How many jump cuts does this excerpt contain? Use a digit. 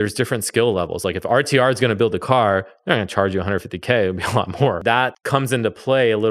1